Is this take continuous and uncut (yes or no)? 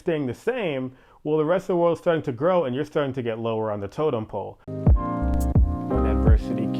no